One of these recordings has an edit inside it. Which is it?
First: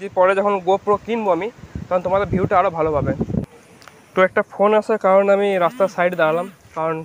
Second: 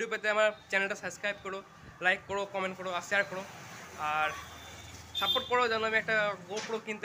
first; 1 cut; at 3.4 s

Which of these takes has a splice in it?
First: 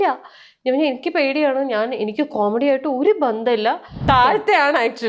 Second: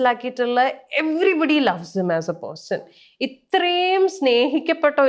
first; 1 cut; at 4.1 s

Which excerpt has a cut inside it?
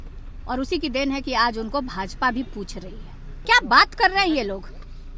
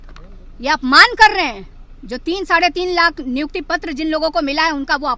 first; 1 cut; at 3.4 s

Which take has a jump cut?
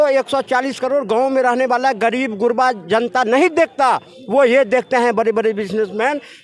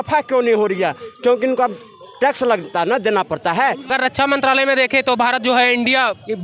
second; 1 cut; at 3.9 s

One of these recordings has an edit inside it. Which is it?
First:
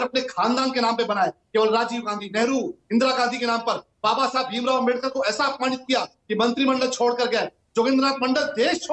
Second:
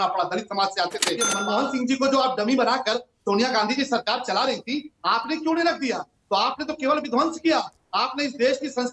second; 1 cut; at 1.3 s

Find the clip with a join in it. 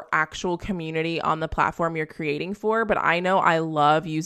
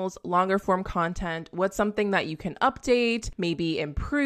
second; 1 cut; at 3.3 s

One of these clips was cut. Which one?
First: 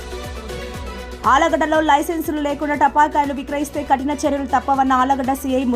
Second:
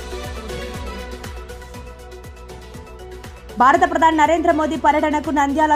first; 1 cut; at 0.9 s

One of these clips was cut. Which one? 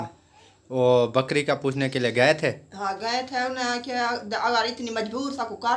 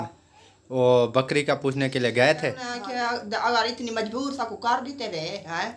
second; 1 cut; at 2.7 s

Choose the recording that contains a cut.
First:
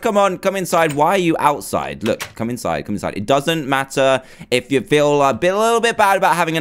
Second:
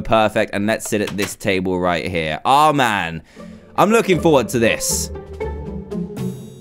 first; 1 cut; at 5.0 s

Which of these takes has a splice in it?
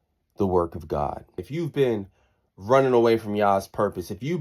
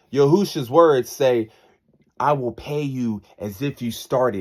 first; 1 cut; at 1.4 s

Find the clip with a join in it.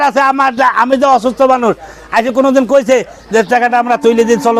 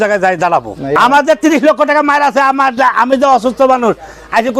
second; 1 cut; at 1.0 s

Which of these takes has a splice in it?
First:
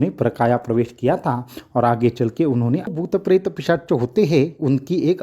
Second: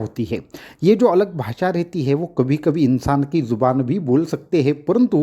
first; 1 cut; at 2.9 s

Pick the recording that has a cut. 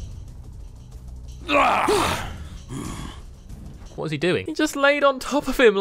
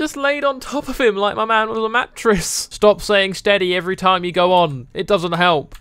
second; 1 cut; at 2.7 s

